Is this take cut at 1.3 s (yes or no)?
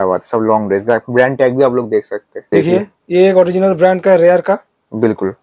no